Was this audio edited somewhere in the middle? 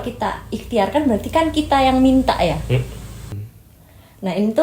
yes; 1 cut; at 3.3 s

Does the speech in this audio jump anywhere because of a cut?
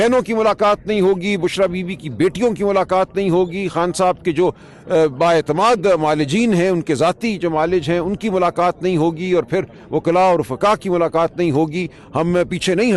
no; 0 cuts

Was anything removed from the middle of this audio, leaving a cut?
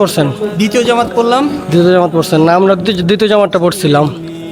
no; 0 cuts

